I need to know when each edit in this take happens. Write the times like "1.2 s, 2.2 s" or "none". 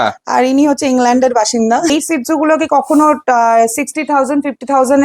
1.9 s